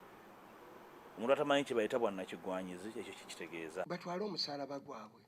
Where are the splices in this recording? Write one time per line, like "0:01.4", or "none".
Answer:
0:03.9